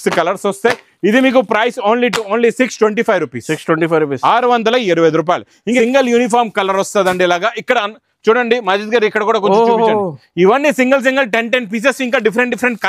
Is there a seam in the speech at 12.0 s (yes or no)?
no